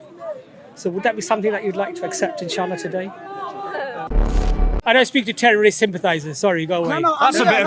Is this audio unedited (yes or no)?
no